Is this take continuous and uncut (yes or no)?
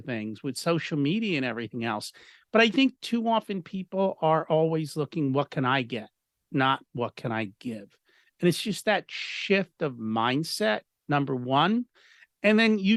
yes